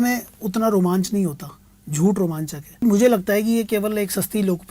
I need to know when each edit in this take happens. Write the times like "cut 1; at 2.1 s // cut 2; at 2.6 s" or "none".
cut 1; at 2.8 s